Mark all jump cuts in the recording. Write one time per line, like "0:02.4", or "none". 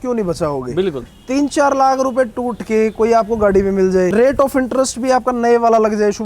0:01.0
0:04.1